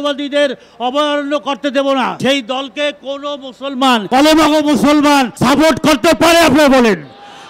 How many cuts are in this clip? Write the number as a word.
three